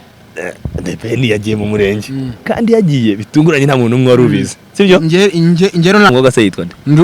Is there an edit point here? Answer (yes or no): yes